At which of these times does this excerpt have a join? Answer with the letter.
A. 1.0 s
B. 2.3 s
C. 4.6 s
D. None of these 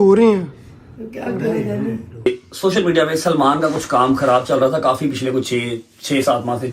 B